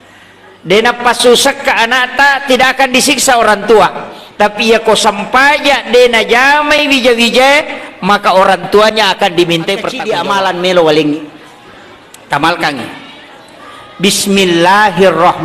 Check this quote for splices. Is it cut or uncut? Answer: cut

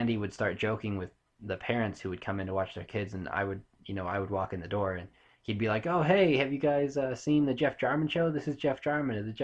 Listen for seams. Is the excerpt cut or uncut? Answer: uncut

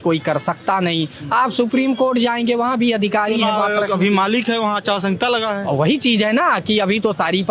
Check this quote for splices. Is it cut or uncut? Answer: uncut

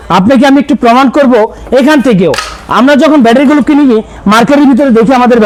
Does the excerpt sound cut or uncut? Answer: uncut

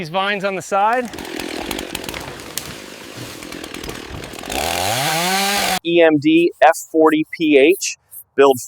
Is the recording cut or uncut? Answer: cut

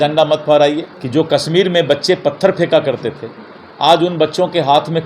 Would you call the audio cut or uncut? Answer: cut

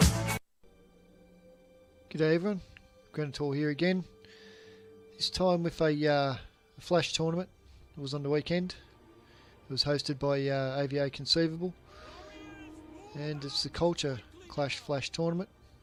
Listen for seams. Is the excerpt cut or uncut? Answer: uncut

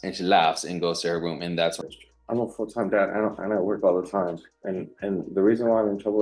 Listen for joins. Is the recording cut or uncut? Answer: cut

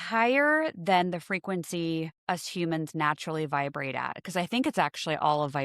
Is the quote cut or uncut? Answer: cut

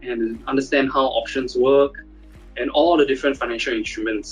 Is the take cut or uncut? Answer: uncut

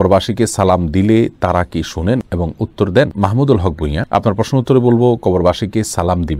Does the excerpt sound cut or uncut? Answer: uncut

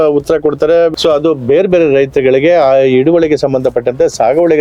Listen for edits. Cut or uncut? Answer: cut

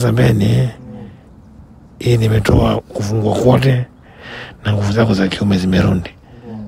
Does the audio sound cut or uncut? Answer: uncut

